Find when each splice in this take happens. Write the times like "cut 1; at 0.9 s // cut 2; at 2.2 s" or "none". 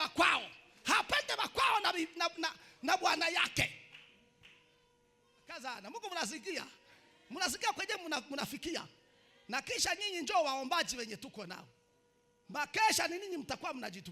cut 1; at 5.6 s